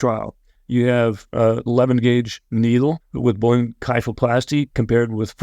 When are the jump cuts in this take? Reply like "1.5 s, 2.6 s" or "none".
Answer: 2.4 s, 3.1 s